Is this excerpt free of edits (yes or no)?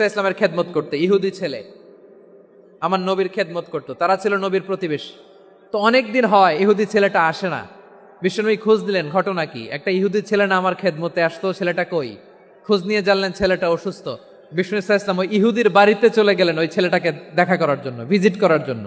yes